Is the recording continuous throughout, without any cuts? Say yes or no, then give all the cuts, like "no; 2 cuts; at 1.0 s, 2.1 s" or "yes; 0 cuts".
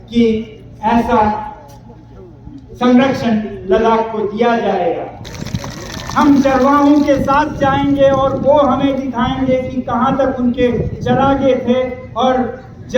no; 1 cut; at 5.3 s